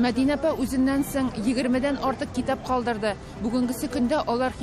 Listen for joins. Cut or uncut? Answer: uncut